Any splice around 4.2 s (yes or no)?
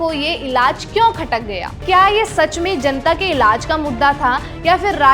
no